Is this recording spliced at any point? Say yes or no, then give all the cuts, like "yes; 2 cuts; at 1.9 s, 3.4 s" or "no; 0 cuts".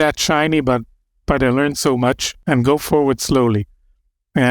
yes; 1 cut; at 2.3 s